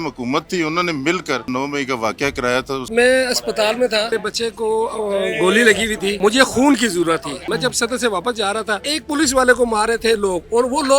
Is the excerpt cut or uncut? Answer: cut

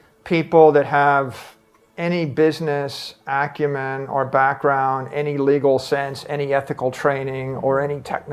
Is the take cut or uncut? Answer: uncut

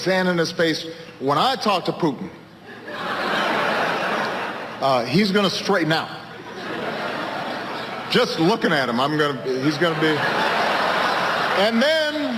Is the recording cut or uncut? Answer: uncut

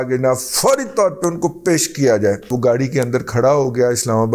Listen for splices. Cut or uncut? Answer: cut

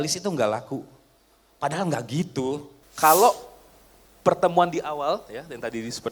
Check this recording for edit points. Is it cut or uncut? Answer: cut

